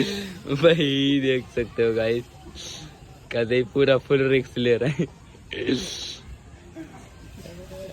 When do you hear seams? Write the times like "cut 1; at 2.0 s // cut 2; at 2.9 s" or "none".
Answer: none